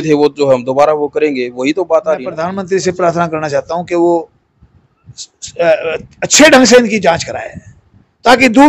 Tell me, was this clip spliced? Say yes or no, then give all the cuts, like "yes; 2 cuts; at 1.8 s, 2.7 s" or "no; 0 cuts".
yes; 1 cut; at 2.5 s